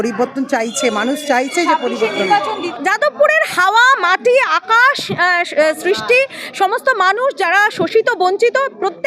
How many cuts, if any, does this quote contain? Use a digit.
1